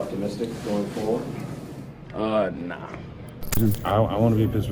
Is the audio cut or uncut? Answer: cut